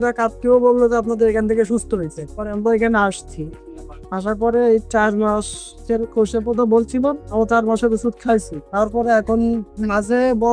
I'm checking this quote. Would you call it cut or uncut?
uncut